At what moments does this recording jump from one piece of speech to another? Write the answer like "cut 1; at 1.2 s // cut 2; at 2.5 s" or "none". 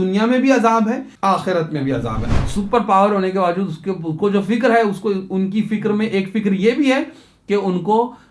cut 1; at 1.1 s // cut 2; at 2.2 s